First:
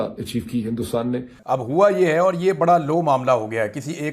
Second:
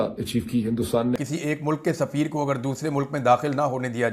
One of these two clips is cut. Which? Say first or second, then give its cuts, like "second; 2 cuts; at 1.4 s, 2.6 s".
second; 1 cut; at 1.3 s